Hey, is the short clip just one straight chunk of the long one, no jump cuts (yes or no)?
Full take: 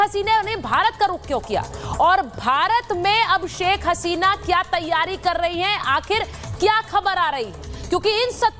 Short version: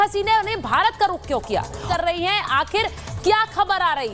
no